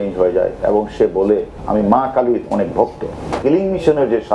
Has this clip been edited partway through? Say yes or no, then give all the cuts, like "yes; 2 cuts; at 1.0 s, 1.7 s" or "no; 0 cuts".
yes; 1 cut; at 3.4 s